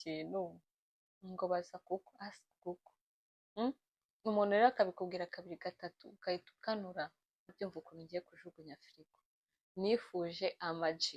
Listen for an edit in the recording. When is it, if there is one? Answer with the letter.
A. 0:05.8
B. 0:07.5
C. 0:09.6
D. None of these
B